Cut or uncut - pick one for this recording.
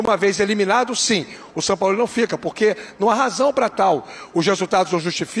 uncut